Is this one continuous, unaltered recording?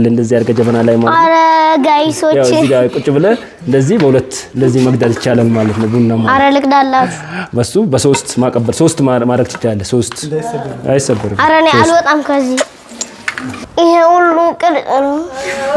no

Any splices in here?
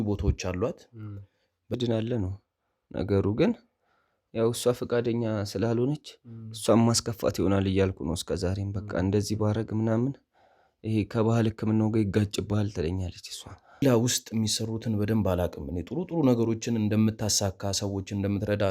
yes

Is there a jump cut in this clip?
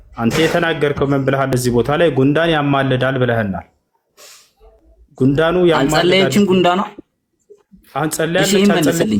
no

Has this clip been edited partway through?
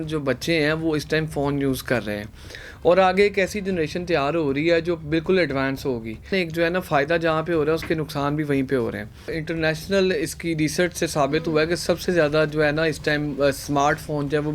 yes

